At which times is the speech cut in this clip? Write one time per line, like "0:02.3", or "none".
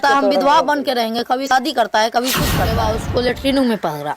0:01.5
0:02.8